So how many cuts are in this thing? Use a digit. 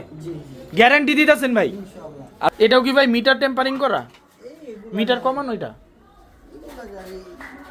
1